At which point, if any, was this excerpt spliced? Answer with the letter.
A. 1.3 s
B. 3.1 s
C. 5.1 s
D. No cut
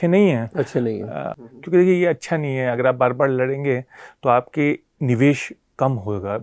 A